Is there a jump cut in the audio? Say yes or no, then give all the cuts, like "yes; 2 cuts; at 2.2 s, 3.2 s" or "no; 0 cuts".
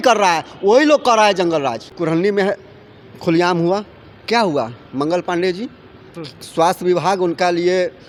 no; 0 cuts